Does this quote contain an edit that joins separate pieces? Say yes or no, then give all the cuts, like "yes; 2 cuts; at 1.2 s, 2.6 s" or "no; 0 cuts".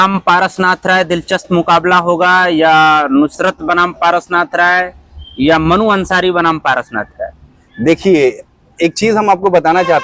no; 0 cuts